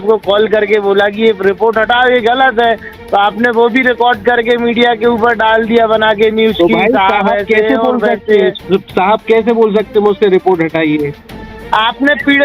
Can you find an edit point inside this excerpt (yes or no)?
yes